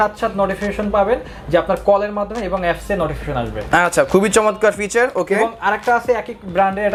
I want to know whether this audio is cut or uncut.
uncut